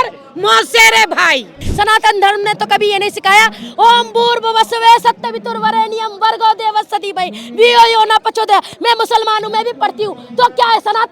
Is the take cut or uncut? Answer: cut